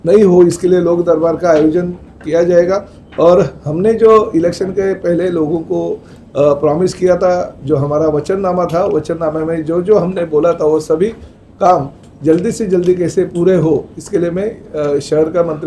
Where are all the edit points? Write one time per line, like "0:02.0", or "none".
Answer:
none